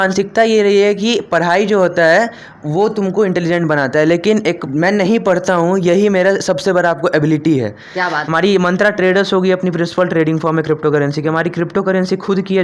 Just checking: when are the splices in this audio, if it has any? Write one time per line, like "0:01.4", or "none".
0:04.6
0:08.2